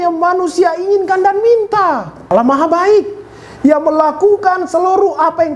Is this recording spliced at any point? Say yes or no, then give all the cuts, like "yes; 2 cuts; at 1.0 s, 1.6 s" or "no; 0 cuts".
yes; 1 cut; at 2.3 s